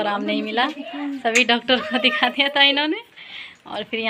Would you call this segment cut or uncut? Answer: uncut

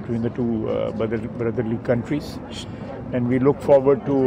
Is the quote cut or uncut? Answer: uncut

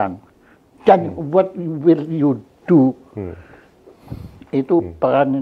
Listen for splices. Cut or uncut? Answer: uncut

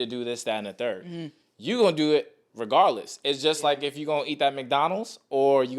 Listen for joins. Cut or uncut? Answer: uncut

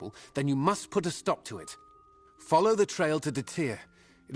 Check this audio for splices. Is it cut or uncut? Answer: uncut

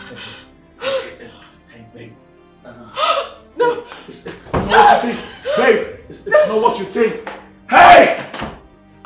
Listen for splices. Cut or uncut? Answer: uncut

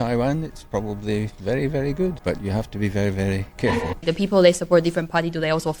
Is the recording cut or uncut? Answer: cut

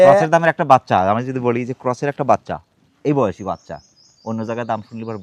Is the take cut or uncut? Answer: uncut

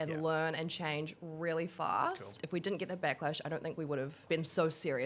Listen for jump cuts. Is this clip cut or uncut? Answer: cut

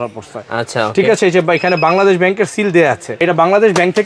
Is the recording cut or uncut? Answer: cut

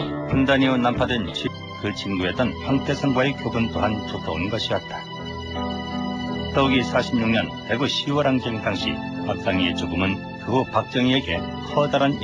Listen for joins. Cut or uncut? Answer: uncut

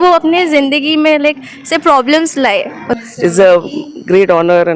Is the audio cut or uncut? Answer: cut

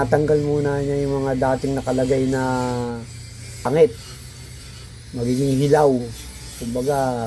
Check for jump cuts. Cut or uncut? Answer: cut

